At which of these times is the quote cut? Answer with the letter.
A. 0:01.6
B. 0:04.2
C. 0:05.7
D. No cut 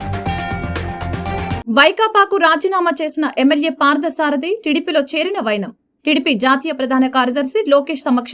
A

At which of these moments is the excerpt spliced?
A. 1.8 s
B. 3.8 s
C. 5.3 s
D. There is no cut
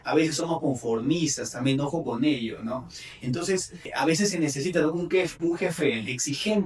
B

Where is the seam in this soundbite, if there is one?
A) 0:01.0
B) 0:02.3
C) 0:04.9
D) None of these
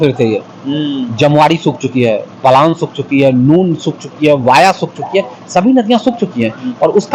D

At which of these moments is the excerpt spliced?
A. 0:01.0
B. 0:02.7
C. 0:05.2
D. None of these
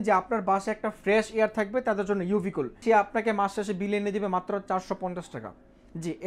B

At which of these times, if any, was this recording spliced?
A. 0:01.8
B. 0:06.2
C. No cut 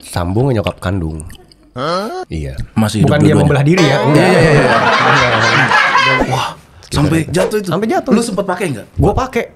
B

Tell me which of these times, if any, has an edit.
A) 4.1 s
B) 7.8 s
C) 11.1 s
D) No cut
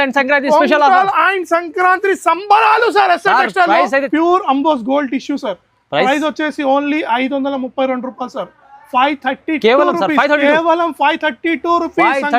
A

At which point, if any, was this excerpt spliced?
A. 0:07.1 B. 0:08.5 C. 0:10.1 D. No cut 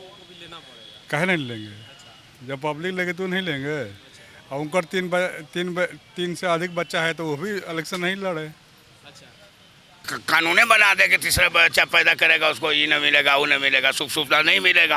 C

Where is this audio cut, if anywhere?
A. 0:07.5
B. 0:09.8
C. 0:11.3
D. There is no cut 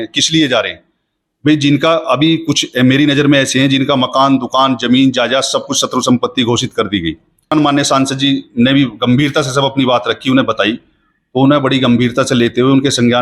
A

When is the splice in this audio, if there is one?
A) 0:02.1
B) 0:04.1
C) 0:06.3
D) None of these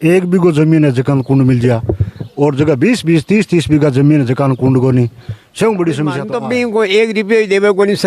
C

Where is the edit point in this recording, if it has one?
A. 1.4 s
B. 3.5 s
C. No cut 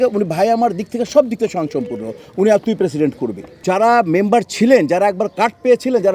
B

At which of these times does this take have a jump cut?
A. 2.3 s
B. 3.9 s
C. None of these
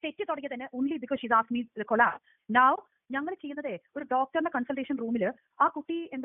C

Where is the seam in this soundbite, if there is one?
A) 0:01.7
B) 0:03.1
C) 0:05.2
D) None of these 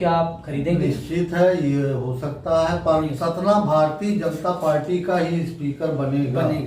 B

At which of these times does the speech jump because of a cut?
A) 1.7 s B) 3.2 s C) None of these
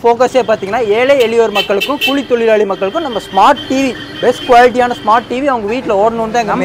C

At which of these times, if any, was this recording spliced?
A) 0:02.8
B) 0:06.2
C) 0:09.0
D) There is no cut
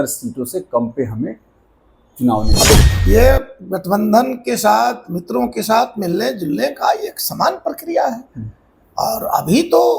A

